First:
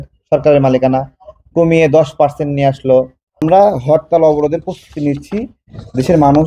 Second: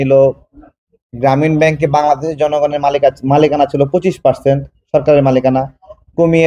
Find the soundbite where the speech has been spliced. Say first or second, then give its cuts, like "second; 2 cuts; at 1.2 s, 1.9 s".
first; 1 cut; at 3.4 s